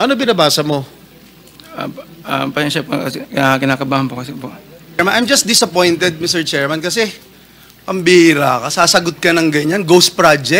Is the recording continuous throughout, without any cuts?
no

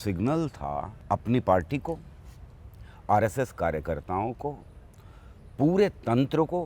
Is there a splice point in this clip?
yes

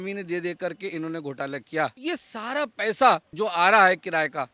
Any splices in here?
yes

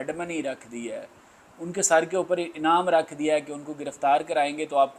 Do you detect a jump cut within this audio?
no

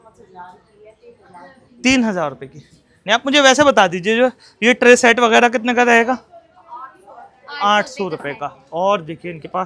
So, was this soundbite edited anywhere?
no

